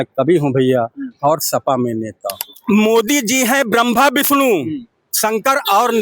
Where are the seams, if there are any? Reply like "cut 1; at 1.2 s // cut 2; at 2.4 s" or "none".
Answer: cut 1; at 2.4 s